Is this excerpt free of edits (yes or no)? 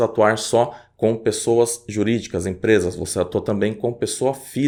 yes